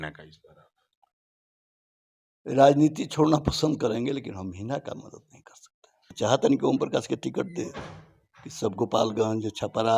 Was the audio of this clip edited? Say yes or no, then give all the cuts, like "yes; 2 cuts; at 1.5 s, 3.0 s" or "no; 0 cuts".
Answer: yes; 1 cut; at 6.2 s